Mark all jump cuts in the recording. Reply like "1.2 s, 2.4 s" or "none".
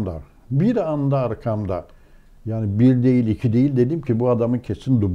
none